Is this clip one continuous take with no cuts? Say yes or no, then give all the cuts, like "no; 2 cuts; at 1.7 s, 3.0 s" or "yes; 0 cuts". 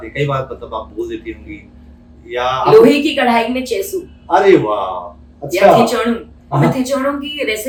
yes; 0 cuts